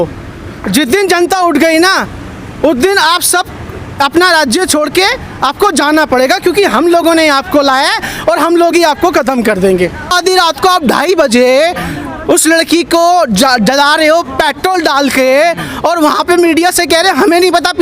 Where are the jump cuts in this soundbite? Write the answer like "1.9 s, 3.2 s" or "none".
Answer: 10.1 s

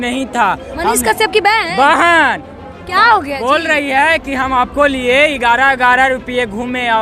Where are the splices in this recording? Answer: none

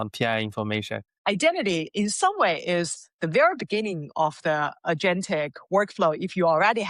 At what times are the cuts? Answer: 1.1 s

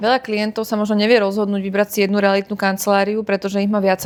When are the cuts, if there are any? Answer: none

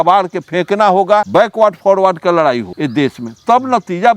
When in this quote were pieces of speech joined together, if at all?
1.3 s, 2.7 s

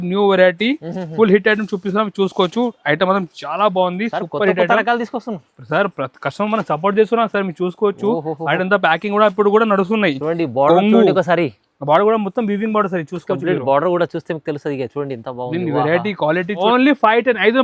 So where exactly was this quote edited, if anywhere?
16.6 s

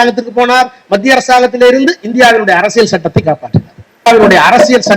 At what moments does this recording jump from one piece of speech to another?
4.1 s

